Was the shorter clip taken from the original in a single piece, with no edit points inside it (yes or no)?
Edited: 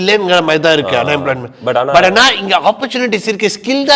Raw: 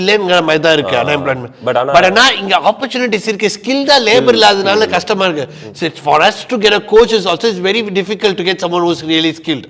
yes